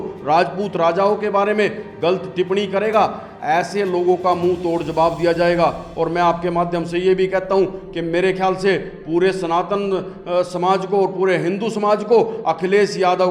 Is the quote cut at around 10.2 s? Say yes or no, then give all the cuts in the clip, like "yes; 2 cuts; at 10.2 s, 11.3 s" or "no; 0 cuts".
no; 0 cuts